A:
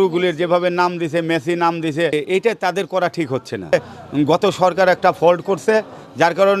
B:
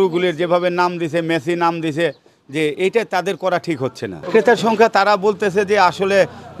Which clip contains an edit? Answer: A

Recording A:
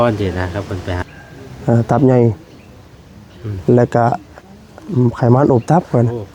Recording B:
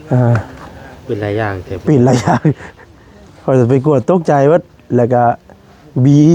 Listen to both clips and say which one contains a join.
A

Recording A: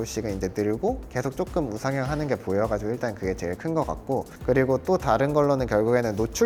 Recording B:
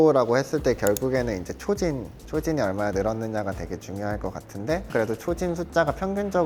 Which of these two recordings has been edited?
B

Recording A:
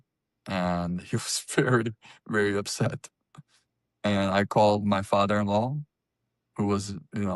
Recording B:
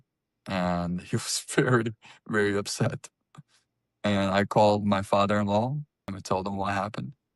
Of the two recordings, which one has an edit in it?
B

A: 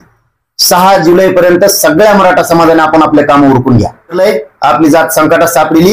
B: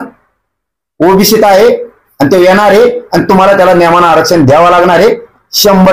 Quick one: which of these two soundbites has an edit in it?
A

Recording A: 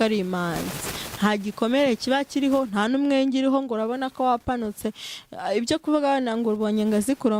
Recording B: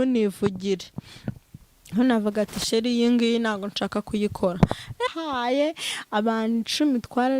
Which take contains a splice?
B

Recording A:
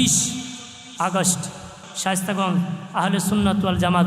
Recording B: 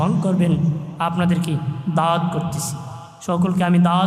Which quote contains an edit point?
A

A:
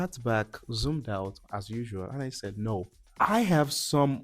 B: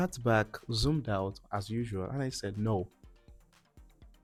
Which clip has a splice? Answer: A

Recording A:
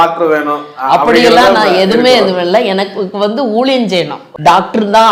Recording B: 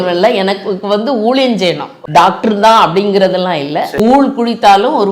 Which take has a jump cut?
B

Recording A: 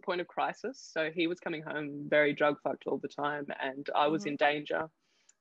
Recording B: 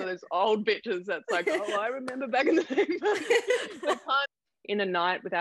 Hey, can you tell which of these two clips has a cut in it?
B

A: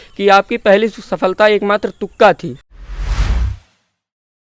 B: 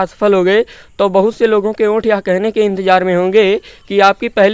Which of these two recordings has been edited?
A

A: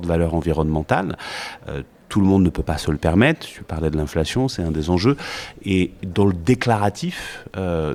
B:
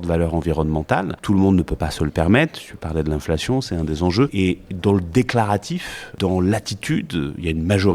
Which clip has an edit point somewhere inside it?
B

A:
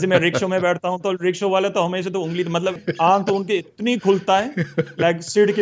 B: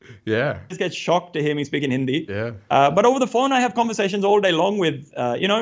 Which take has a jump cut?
A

